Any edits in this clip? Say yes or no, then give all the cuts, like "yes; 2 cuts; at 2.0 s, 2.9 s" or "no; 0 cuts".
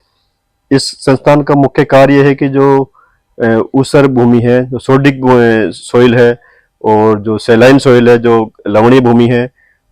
no; 0 cuts